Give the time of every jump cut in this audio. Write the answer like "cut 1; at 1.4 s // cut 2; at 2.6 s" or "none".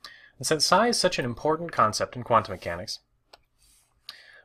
none